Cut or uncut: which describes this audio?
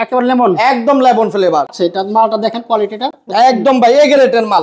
cut